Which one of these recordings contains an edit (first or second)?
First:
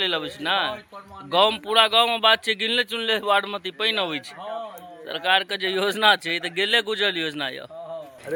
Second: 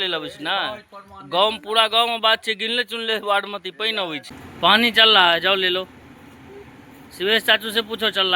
second